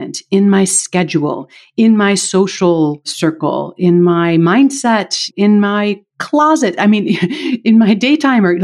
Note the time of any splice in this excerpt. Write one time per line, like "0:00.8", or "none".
0:03.1
0:05.3